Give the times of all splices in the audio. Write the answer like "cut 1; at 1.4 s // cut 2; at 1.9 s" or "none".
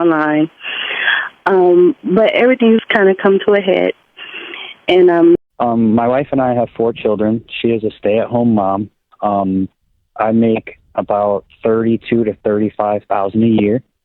cut 1; at 5.4 s